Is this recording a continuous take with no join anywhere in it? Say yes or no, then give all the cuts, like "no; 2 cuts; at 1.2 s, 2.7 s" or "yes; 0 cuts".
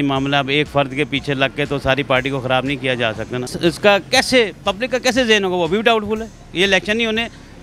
no; 1 cut; at 3.5 s